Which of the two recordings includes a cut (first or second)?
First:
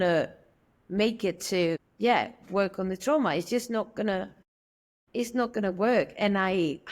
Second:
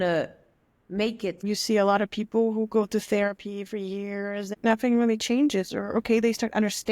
second